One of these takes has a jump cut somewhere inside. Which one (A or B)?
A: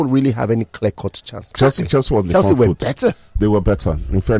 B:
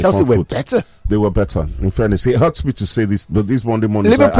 A